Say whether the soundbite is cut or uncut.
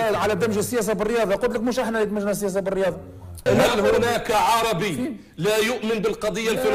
cut